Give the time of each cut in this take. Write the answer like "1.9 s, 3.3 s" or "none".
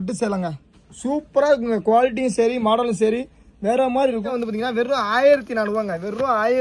4.3 s